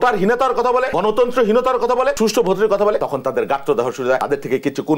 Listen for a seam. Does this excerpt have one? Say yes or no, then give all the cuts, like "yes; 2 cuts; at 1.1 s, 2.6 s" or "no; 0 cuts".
yes; 4 cuts; at 0.9 s, 2.2 s, 3.0 s, 4.2 s